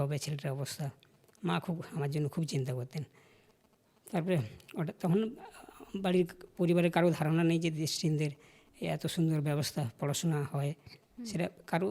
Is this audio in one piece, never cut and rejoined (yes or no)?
yes